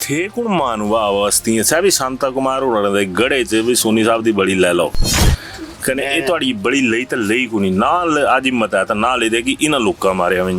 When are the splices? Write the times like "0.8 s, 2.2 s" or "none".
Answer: none